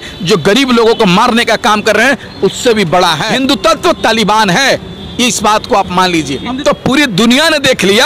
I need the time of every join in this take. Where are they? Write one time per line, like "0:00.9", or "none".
0:03.3
0:06.6